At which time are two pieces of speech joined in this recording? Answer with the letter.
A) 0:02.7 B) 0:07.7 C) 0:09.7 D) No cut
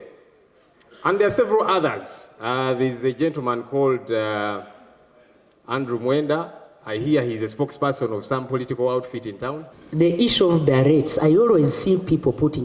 C